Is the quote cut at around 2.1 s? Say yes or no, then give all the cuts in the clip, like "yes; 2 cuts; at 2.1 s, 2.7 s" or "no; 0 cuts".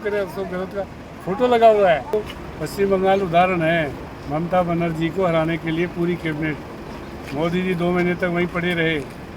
yes; 1 cut; at 2.1 s